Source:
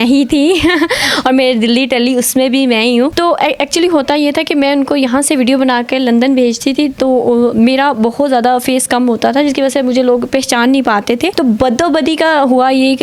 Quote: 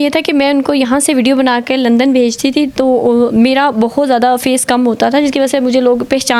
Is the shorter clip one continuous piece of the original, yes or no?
yes